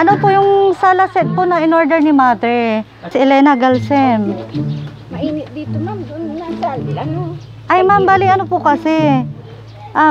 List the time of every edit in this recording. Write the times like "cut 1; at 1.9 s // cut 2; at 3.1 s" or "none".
cut 1; at 3.1 s